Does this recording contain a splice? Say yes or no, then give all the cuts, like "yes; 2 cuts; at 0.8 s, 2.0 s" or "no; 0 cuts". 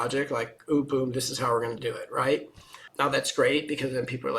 yes; 1 cut; at 2.9 s